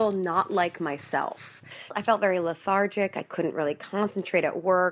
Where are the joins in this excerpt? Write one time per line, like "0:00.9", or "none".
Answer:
0:02.0